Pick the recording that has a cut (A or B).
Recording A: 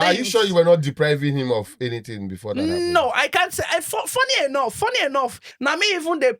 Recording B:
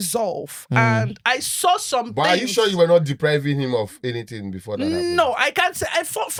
A